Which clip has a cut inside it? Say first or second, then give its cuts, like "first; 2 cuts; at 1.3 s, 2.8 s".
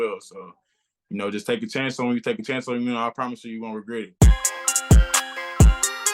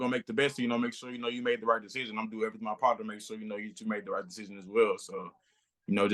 first; 1 cut; at 4.1 s